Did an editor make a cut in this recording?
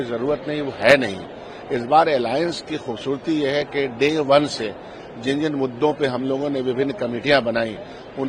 no; 0 cuts

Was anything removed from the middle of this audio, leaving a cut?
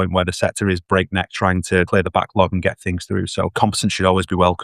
yes; 2 cuts; at 1.9 s, 3.5 s

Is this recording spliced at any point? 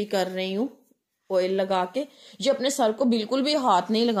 no; 0 cuts

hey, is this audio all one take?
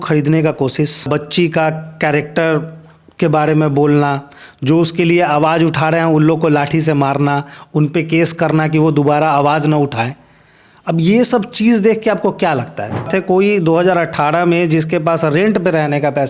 no; 2 cuts; at 1.1 s, 13.1 s

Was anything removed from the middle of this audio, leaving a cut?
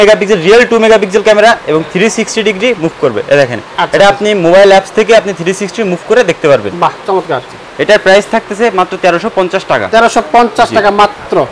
no; 0 cuts

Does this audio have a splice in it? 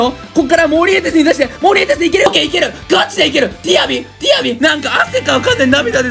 yes; 2 cuts; at 2.3 s, 4.6 s

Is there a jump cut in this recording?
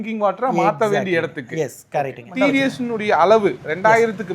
yes; 1 cut; at 2.3 s

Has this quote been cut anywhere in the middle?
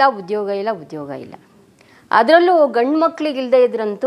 no; 0 cuts

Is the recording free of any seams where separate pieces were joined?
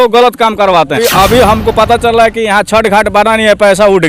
no; 1 cut; at 1.0 s

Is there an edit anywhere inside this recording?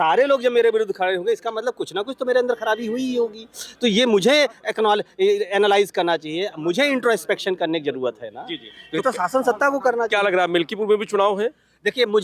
no; 0 cuts

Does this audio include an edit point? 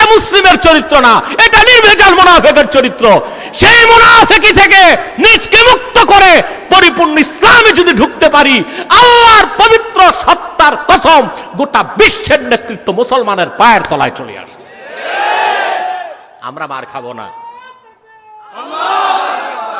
no; 0 cuts

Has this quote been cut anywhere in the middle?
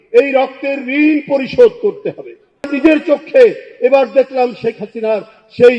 no; 0 cuts

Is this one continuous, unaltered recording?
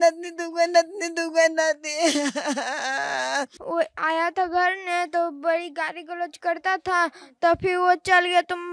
no; 1 cut; at 3.6 s

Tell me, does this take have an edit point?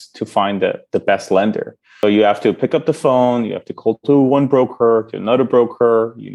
yes; 1 cut; at 2.0 s

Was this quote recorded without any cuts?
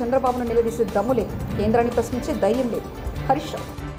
yes; 0 cuts

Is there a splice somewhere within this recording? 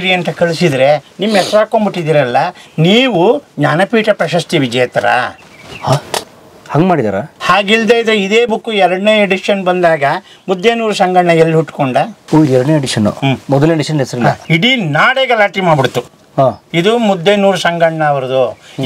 no; 0 cuts

